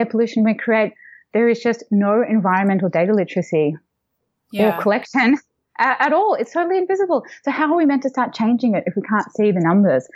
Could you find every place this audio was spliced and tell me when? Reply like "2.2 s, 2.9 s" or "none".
none